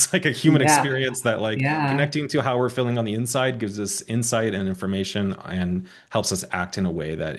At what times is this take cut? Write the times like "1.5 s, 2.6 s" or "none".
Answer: none